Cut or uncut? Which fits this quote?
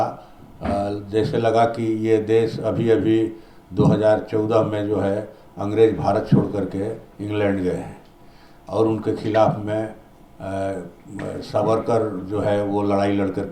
uncut